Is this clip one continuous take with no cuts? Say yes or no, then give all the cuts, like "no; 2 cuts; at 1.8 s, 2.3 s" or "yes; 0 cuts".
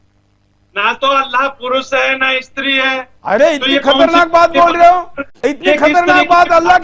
no; 1 cut; at 5.3 s